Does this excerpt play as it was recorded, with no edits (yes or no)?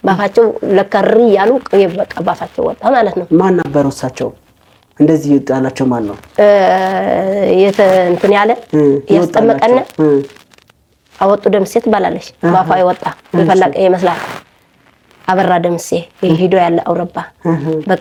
yes